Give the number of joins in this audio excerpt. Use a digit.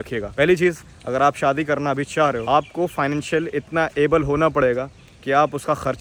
0